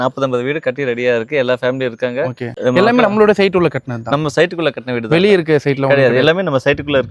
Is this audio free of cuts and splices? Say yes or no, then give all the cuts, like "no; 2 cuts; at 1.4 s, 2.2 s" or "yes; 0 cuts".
yes; 0 cuts